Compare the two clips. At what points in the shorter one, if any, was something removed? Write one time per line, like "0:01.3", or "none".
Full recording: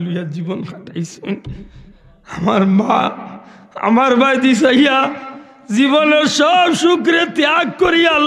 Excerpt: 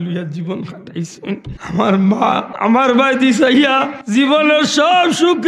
0:01.5
0:02.5
0:03.9